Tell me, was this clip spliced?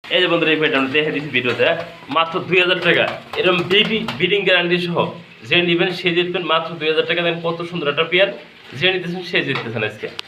no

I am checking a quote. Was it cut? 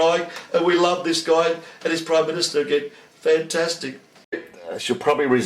yes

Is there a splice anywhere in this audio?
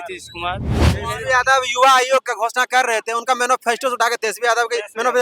yes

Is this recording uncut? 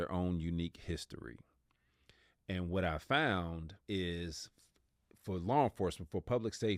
no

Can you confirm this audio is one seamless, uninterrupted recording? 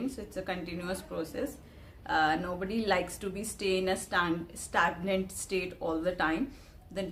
yes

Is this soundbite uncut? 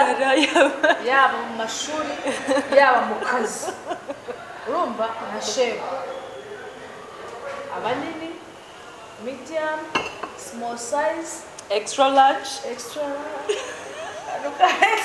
yes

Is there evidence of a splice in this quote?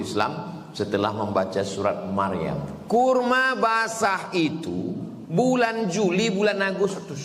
yes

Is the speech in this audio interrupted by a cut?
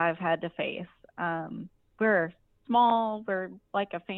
no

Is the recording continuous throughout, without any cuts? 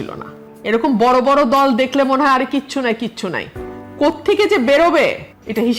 yes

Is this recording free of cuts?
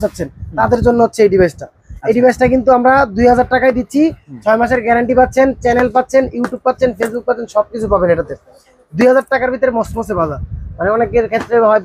yes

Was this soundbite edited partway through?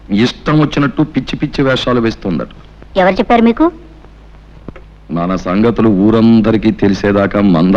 no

